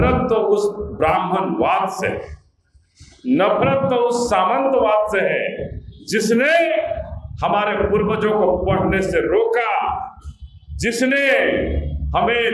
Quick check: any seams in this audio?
no; 0 cuts

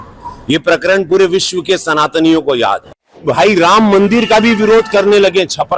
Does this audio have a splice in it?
yes; 1 cut; at 3.2 s

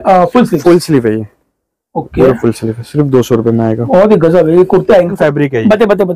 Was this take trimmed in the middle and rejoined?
yes; 1 cut; at 5.1 s

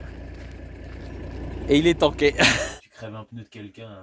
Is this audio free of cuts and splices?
no; 1 cut; at 2.7 s

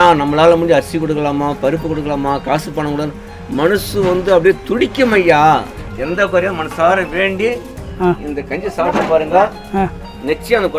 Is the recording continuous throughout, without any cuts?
no; 1 cut; at 5.9 s

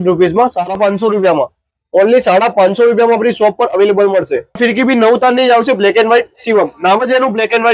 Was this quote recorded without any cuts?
no; 2 cuts; at 0.8 s, 4.6 s

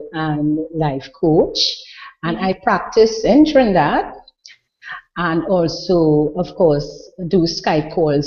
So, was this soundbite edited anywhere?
no; 0 cuts

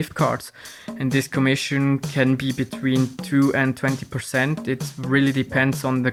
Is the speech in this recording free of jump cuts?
yes; 0 cuts

